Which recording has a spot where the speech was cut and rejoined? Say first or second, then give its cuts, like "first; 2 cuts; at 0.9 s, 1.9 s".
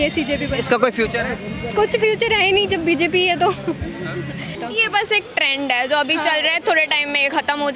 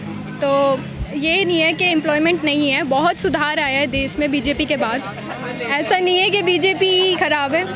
first; 1 cut; at 4.5 s